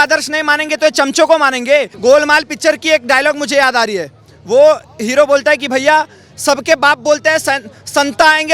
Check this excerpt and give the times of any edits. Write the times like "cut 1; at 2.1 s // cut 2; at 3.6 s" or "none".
cut 1; at 1.9 s